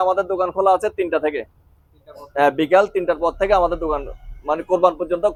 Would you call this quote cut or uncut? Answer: uncut